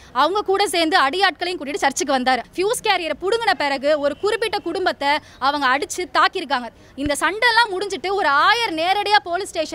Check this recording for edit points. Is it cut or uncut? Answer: cut